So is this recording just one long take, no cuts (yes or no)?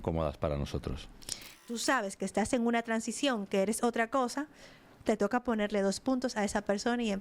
no